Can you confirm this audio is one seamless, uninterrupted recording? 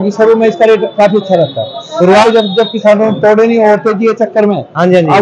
no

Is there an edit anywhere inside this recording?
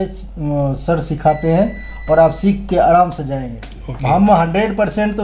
no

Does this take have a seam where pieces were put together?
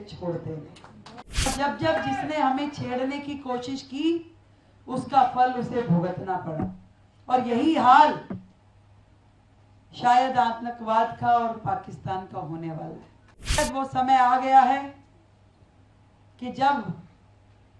yes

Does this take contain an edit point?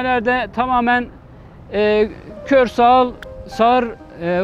no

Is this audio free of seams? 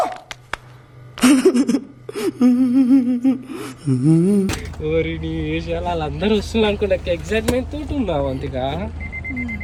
yes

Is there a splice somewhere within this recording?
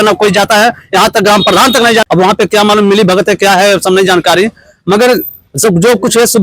yes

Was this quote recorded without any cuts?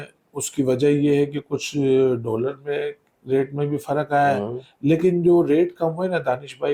yes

